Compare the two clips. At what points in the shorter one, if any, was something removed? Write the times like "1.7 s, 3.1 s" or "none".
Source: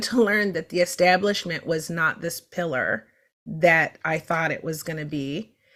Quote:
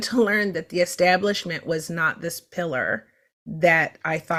none